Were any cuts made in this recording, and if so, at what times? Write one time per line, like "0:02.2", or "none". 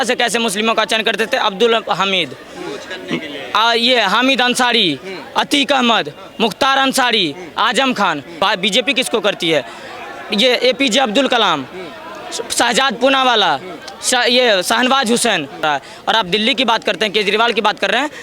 0:08.4
0:15.6